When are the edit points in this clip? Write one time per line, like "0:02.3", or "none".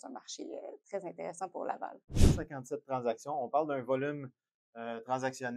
0:02.3